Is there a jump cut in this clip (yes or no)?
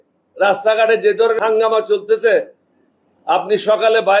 yes